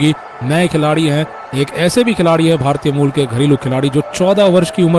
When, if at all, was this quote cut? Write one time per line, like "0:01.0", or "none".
none

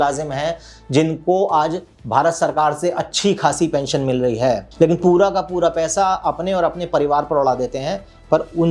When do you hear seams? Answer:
0:04.7

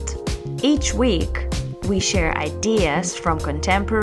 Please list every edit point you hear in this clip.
none

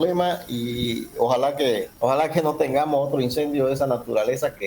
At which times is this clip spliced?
0:01.9

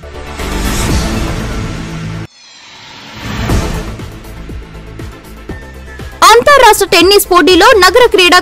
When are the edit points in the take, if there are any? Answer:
0:01.7

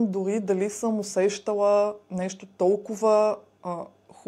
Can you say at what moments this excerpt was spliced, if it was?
none

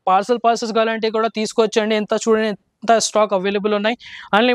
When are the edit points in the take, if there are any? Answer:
none

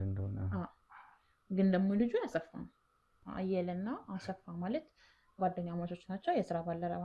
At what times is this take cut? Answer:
0:03.2

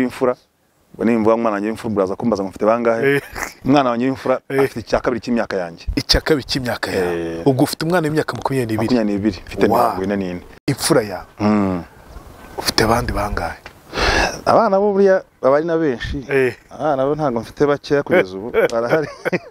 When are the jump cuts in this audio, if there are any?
0:10.6

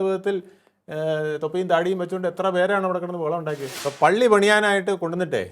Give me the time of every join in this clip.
0:03.7

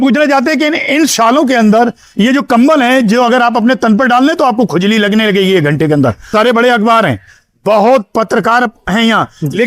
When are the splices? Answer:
0:06.3

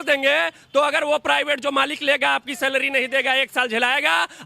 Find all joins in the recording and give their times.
none

